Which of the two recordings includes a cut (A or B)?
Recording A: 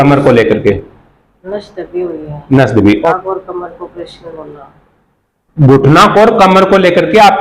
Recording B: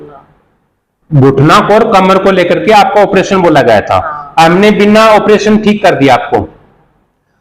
A